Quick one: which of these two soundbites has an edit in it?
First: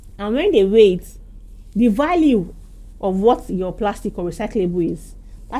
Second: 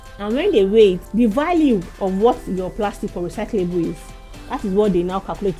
second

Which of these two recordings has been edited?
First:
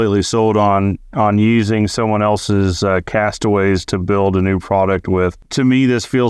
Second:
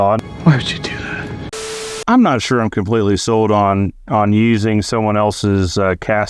second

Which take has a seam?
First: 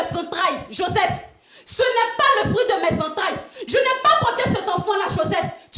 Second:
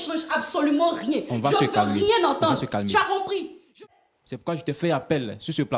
second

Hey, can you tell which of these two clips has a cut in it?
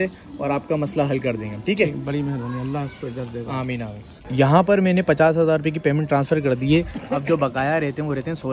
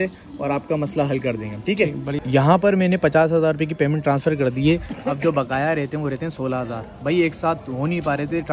second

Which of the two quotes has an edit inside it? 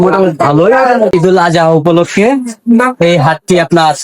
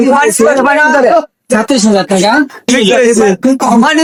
first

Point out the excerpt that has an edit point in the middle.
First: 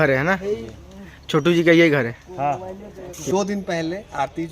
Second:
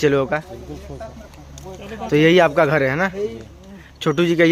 first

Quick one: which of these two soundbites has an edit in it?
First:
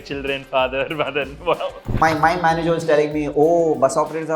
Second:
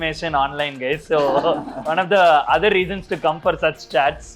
first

